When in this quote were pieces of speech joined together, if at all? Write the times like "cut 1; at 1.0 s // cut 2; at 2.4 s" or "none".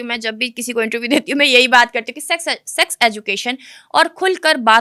none